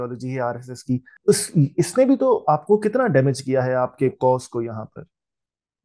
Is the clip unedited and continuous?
no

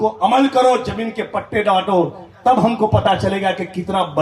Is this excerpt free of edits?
yes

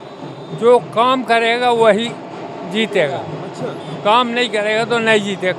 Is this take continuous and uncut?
yes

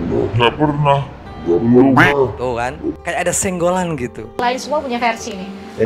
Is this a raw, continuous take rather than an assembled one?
no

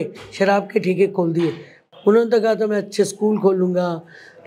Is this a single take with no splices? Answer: no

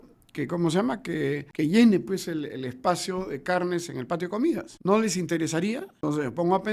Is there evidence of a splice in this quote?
yes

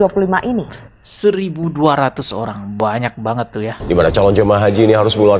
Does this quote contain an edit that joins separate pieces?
yes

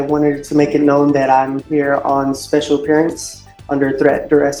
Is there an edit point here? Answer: no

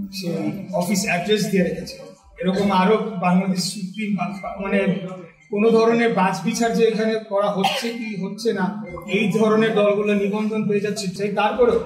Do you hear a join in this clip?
no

